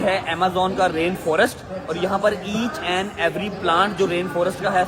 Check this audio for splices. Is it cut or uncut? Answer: uncut